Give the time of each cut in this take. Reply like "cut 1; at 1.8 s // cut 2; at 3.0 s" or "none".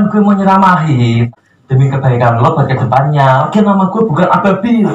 cut 1; at 1.3 s